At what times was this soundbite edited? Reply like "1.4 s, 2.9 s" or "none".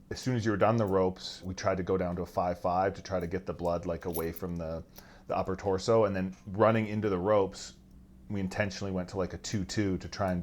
1.5 s